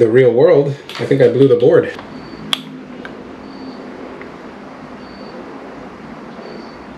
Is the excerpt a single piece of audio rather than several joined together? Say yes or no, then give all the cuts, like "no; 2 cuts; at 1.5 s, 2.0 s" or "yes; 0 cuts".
no; 1 cut; at 1.9 s